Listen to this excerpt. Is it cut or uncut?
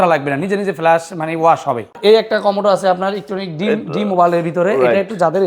cut